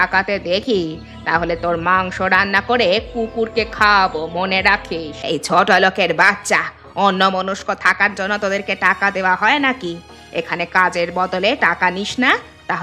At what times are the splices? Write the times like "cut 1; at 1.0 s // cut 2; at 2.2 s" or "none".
cut 1; at 5.1 s